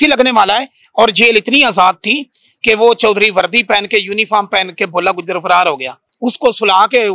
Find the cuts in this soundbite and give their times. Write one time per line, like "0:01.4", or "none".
0:06.1